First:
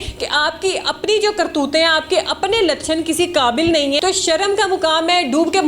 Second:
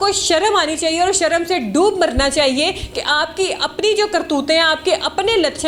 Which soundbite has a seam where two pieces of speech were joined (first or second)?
first